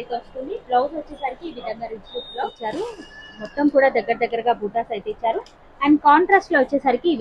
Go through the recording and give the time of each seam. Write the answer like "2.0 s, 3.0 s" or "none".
2.7 s